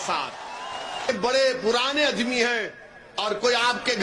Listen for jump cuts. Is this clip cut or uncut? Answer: cut